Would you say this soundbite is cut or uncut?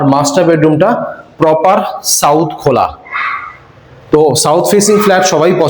uncut